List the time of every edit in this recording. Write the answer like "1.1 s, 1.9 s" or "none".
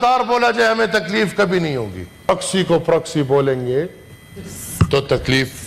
2.3 s